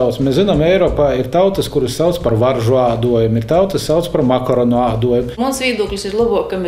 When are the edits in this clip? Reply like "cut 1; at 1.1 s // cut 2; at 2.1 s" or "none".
cut 1; at 5.3 s